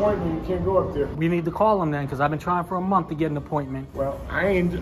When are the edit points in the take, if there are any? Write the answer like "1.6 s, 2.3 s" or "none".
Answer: 1.1 s